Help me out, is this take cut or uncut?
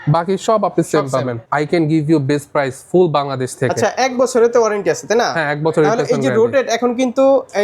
cut